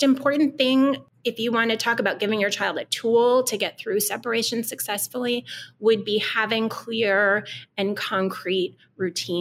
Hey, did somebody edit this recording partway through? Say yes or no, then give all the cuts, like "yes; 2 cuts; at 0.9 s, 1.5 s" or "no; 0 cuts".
yes; 1 cut; at 1.1 s